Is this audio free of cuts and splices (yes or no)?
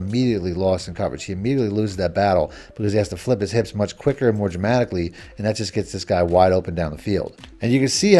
yes